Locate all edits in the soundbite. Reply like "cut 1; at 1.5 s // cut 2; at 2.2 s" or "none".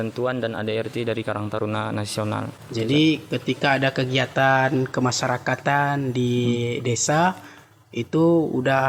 none